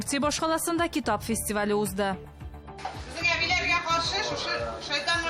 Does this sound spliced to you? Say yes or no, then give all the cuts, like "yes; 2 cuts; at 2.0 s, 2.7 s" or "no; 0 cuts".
no; 0 cuts